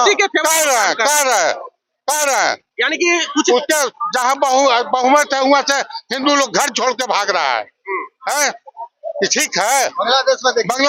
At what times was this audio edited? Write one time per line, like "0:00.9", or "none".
none